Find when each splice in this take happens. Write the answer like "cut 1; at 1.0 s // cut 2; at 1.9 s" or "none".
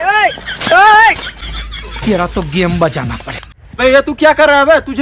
cut 1; at 1.3 s // cut 2; at 3.6 s